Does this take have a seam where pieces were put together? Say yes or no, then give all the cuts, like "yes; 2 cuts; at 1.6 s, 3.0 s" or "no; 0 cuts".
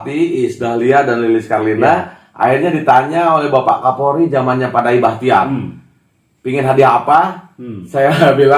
no; 0 cuts